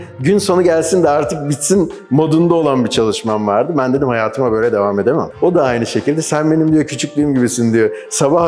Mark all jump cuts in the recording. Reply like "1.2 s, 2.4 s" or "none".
5.3 s